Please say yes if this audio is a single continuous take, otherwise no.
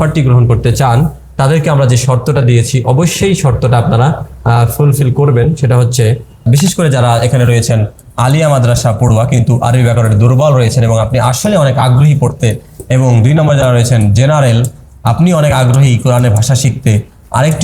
no